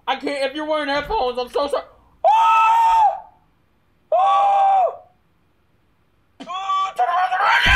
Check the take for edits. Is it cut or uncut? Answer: uncut